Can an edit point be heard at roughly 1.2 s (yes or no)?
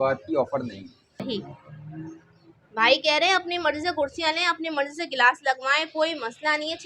yes